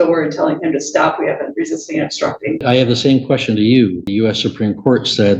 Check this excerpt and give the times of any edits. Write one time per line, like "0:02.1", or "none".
0:02.6
0:04.1